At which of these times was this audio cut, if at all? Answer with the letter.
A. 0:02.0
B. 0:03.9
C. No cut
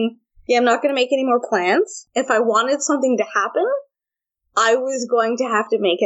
A